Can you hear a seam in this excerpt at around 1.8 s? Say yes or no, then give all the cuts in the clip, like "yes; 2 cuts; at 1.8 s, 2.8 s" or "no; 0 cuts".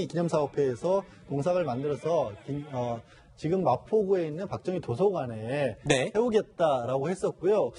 yes; 1 cut; at 1.8 s